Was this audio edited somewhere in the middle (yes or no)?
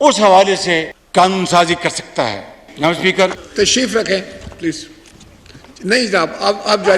yes